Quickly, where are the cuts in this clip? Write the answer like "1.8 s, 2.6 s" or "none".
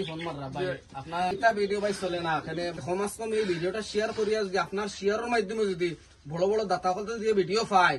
1.3 s, 2.8 s